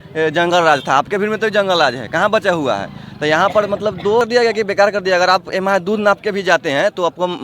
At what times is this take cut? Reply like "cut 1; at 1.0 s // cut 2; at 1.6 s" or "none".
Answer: cut 1; at 4.2 s